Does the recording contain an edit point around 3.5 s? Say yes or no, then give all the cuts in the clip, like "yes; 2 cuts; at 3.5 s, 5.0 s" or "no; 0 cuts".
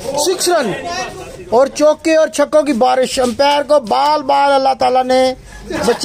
no; 0 cuts